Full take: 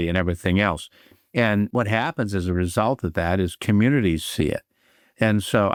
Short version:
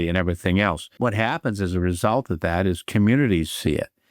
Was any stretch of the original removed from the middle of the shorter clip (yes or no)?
yes